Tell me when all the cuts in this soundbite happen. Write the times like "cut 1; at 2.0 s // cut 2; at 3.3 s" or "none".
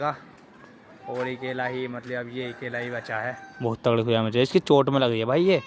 cut 1; at 3.4 s